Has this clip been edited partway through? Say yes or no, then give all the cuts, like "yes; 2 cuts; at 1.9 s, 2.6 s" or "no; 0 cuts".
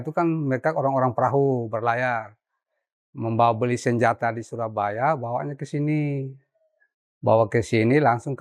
no; 0 cuts